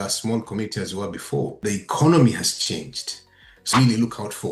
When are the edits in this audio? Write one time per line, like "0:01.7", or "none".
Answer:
0:01.6
0:03.7